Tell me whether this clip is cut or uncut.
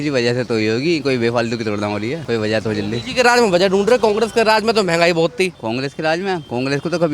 uncut